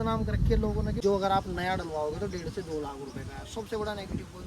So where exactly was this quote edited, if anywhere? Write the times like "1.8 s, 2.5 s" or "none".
1.0 s